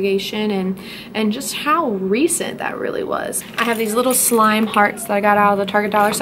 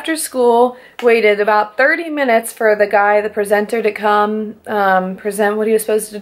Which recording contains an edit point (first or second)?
first